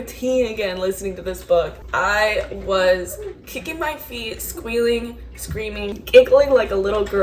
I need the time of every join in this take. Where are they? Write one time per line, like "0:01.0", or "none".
0:06.0